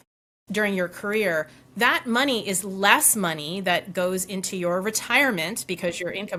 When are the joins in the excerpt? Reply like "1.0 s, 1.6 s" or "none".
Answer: none